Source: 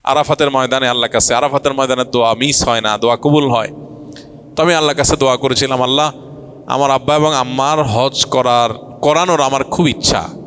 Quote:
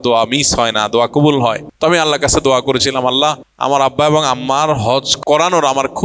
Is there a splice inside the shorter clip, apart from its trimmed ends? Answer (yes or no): yes